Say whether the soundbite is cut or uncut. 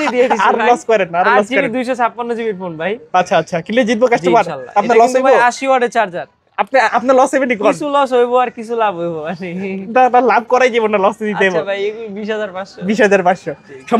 uncut